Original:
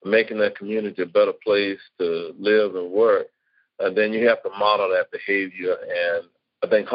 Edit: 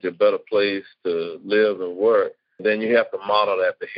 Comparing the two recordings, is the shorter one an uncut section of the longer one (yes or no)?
no